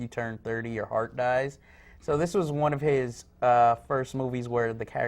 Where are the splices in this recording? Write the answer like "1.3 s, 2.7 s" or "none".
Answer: 3.1 s